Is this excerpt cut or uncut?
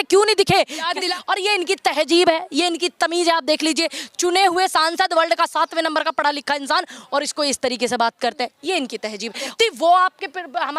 cut